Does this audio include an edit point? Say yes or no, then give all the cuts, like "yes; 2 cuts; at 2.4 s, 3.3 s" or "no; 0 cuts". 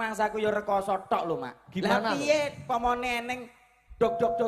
yes; 1 cut; at 1.7 s